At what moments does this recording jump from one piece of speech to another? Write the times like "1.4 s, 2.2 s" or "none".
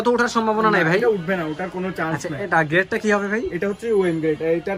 none